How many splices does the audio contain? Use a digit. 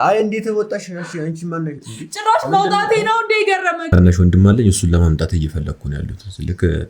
1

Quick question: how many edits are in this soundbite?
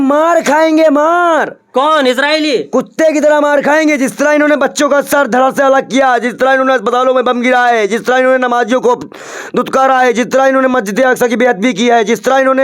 0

